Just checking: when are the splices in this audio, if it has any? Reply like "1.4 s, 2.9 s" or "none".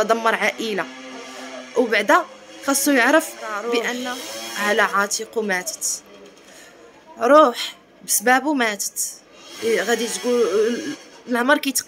3.9 s